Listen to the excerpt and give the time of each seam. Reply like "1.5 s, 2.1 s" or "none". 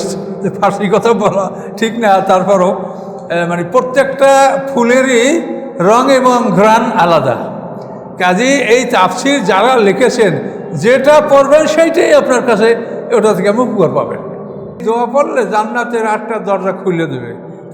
14.8 s